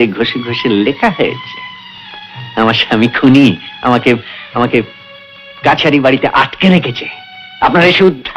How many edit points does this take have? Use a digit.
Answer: 0